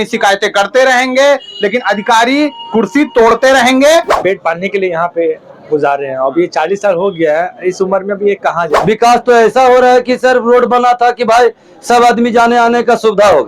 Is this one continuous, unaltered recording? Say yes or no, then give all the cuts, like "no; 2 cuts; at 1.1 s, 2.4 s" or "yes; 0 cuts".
no; 2 cuts; at 4.1 s, 8.7 s